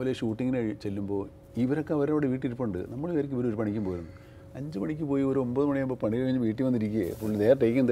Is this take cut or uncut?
uncut